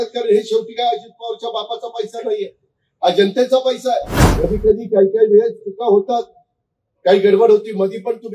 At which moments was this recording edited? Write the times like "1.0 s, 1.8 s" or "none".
4.2 s